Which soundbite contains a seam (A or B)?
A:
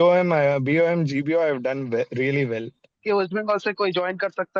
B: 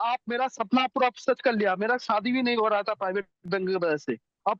A